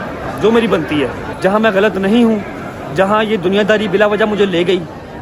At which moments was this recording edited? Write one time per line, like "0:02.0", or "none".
0:01.2

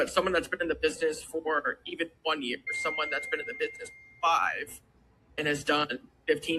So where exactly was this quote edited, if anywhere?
0:02.7
0:05.4

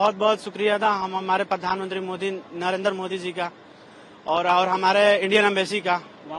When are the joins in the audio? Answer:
none

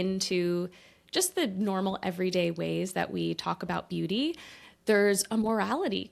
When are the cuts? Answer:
none

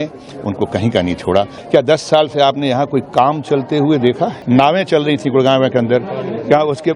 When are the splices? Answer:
0:01.6
0:04.4

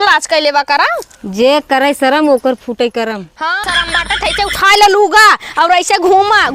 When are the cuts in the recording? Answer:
0:03.6

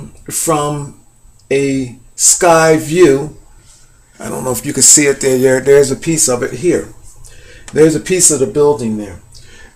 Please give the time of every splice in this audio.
0:05.6

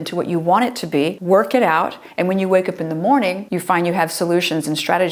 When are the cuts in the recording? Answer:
0:01.2
0:03.5

